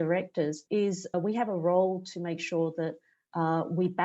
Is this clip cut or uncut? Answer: cut